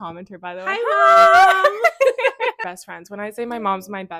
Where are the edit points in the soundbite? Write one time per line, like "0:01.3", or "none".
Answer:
none